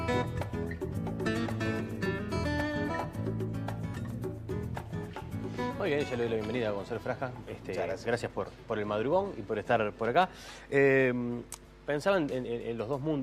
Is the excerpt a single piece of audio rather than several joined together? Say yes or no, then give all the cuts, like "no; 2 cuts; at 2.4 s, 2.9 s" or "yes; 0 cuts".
yes; 0 cuts